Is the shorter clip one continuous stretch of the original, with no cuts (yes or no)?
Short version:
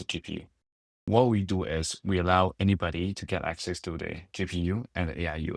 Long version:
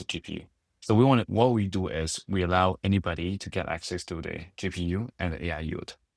no